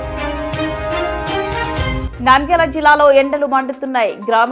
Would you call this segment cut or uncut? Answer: cut